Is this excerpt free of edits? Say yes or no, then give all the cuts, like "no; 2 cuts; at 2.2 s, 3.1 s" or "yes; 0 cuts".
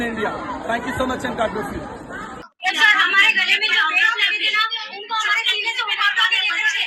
no; 1 cut; at 2.5 s